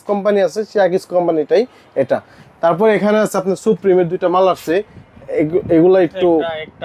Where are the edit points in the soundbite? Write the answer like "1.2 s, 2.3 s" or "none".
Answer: none